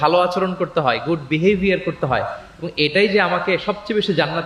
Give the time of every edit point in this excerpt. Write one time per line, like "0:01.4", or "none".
none

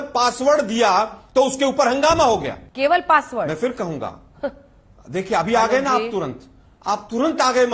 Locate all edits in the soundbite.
0:02.6

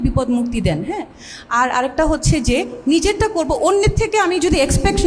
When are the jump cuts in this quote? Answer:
none

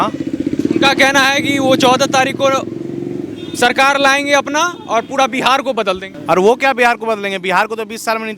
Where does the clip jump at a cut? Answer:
0:06.1

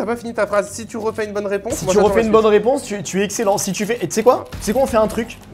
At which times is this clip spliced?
0:04.5

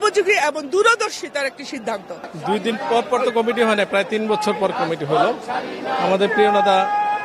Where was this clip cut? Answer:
none

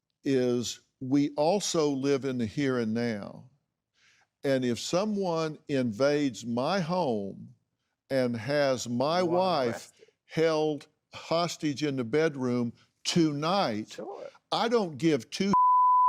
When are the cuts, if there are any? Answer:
none

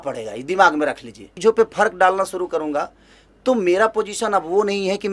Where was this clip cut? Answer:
0:01.3

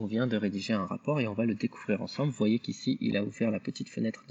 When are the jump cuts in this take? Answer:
none

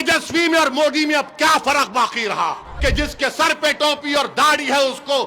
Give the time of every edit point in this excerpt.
0:02.7

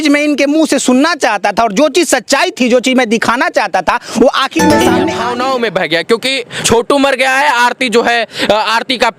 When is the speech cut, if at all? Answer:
0:05.1

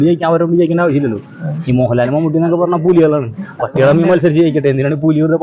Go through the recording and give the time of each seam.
none

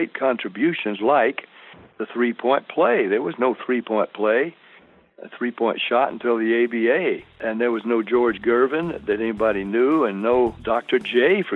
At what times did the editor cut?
0:07.4
0:10.6

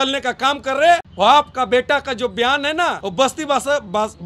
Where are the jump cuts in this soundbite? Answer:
0:01.1
0:03.0

